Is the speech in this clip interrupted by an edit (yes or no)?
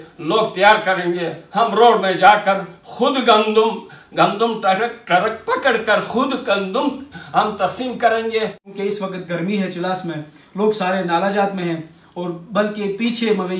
yes